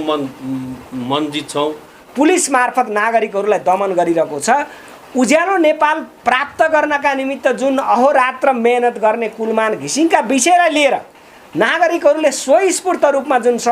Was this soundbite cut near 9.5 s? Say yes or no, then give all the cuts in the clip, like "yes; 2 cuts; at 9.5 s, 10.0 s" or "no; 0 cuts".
no; 1 cut; at 2.0 s